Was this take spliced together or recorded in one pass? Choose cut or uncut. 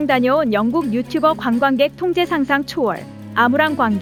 uncut